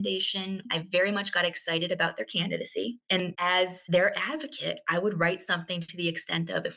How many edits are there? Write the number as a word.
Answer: one